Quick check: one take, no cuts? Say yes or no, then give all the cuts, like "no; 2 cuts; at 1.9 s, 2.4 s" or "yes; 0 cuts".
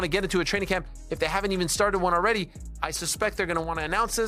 yes; 0 cuts